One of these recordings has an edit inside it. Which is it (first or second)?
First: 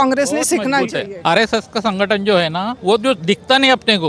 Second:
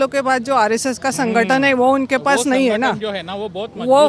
first